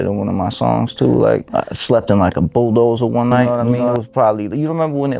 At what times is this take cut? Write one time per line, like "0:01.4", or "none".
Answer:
0:01.5